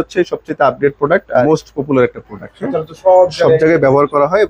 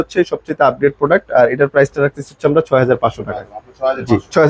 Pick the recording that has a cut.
first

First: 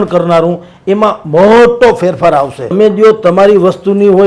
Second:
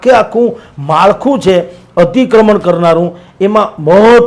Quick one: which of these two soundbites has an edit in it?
first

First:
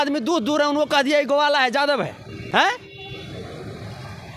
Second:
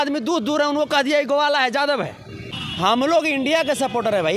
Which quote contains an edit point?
second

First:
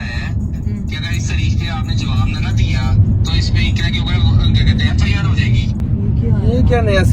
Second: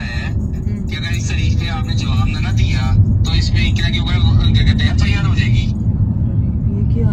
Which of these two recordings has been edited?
first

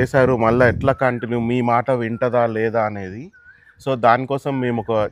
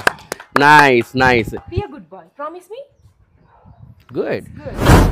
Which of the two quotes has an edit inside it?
second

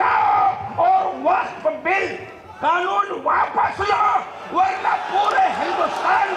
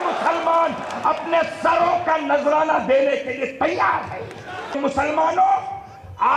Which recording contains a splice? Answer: second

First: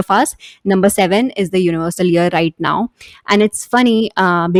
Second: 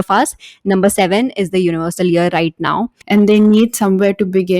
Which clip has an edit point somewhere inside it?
second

